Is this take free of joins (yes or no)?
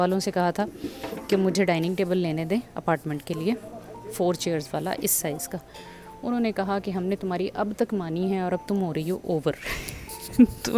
yes